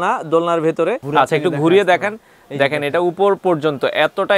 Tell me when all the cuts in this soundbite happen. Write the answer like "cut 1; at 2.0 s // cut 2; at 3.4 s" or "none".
cut 1; at 1.0 s